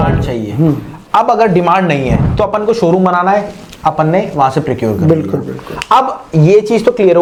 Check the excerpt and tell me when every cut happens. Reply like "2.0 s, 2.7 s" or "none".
none